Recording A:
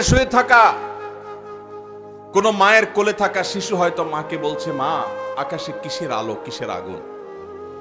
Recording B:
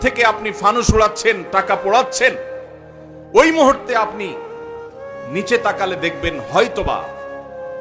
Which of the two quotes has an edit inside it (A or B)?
A